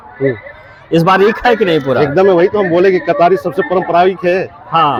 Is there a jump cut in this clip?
no; 0 cuts

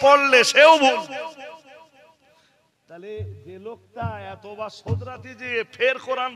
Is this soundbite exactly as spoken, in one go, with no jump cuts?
yes; 0 cuts

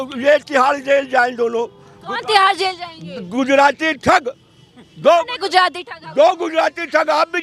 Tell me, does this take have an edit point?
no; 0 cuts

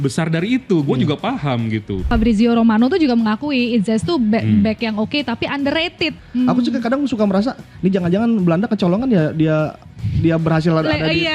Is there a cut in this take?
yes; 2 cuts; at 2.1 s, 6.2 s

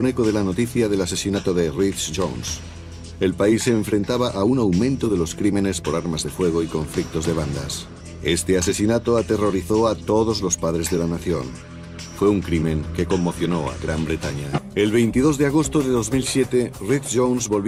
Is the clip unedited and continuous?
yes; 0 cuts

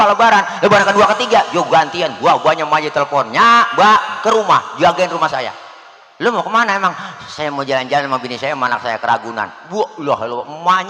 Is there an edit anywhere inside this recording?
no; 0 cuts

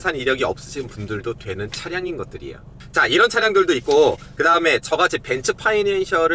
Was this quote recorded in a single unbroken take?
yes; 0 cuts

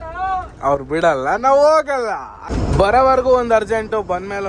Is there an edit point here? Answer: yes; 1 cut; at 2.5 s

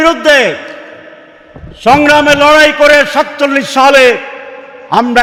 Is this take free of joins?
yes; 0 cuts

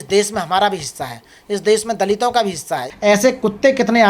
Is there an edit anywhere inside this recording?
yes; 1 cut; at 2.9 s

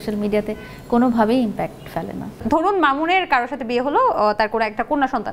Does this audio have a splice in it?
no; 0 cuts

